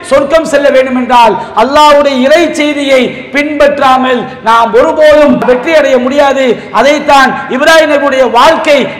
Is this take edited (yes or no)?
yes